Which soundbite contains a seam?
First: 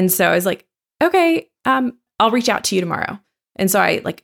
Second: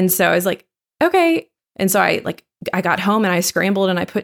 second; 1 cut; at 1.5 s

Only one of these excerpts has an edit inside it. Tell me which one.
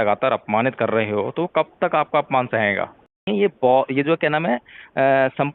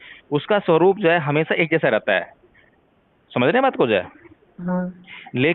first; 1 cut; at 3.3 s

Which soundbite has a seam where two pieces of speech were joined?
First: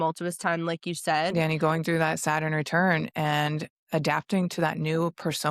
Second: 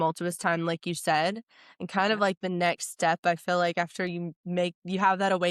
first; 1 cut; at 1.6 s

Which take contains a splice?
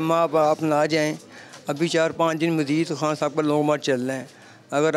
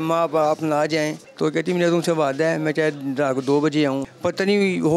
second; 2 cuts; at 1.2 s, 4.0 s

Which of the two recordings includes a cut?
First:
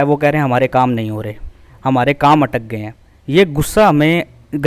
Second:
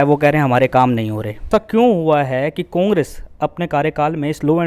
second; 1 cut; at 1.5 s

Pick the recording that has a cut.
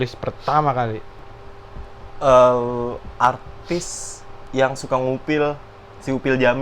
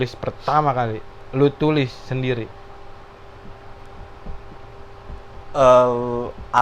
first; 1 cut; at 1.1 s

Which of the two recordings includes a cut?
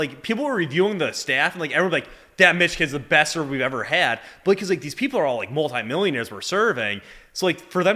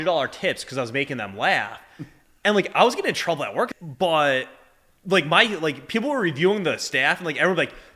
second; 1 cut; at 3.7 s

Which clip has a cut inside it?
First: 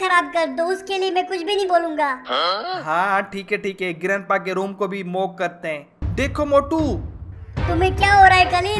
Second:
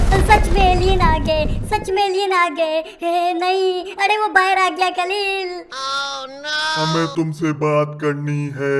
first; 1 cut; at 6.0 s

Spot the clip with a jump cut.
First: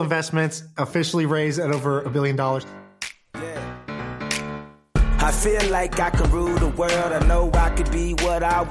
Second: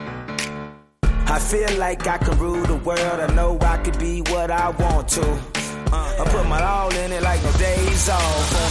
first; 1 cut; at 2.7 s

